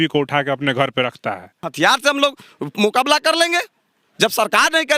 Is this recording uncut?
no; 1 cut; at 1.7 s

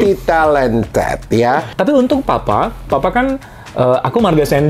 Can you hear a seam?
yes; 1 cut; at 1.7 s

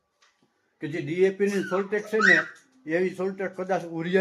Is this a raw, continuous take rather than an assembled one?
yes; 0 cuts

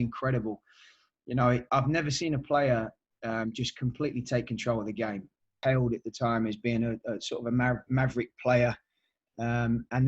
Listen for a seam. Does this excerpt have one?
yes; 1 cut; at 5.5 s

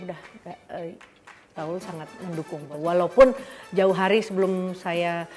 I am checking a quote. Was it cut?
yes; 1 cut; at 2.7 s

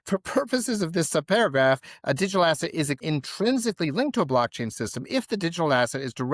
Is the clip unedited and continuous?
no; 1 cut; at 3.0 s

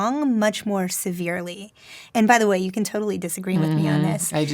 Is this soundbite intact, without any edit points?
no; 1 cut; at 2.0 s

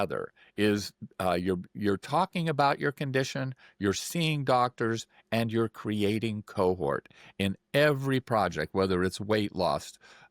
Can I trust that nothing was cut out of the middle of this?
yes; 0 cuts

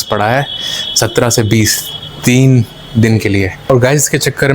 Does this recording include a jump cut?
yes; 1 cut; at 3.6 s

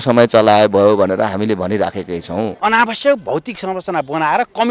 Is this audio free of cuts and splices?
no; 1 cut; at 2.5 s

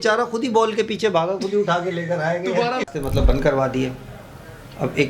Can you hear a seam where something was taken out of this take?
yes; 1 cut; at 2.8 s

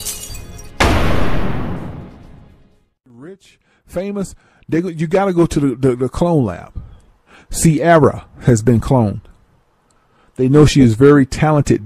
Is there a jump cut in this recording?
no; 0 cuts

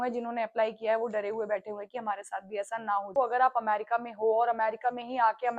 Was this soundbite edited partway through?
yes; 1 cut; at 3.1 s

